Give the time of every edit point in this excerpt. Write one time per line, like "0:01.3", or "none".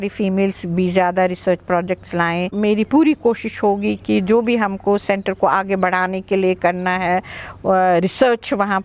0:02.5

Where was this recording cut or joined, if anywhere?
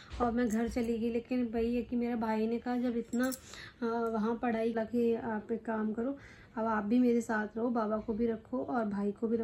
0:04.7

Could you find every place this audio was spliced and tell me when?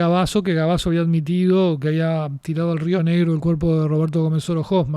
none

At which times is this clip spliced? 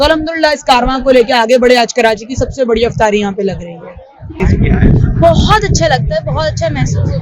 0:04.4

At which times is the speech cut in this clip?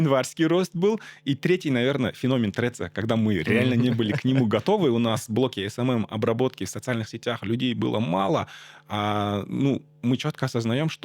none

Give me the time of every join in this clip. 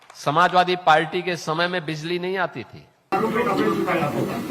0:03.1

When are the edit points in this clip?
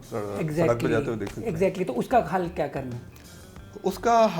none

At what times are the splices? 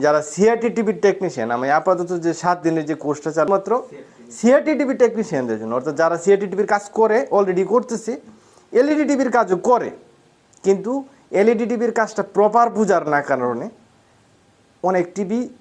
0:03.5

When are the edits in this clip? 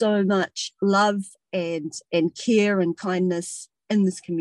0:02.0

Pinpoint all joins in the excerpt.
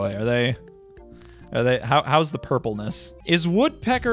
0:03.1

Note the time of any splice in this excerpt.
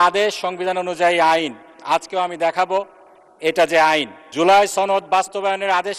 0:04.2

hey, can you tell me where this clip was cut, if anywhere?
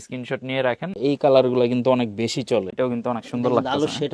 0:01.0
0:02.7

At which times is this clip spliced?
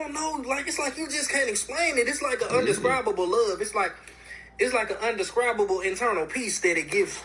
none

